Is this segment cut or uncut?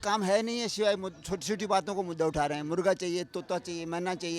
uncut